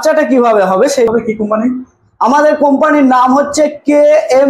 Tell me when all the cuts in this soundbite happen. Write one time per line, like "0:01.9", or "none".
0:01.1